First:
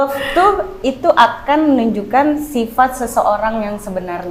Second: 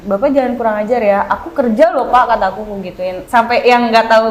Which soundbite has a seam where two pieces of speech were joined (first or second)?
second